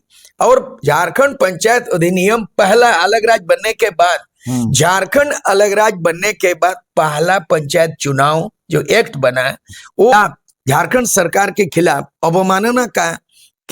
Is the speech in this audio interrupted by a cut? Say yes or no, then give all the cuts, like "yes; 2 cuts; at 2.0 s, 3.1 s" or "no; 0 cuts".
yes; 1 cut; at 10.1 s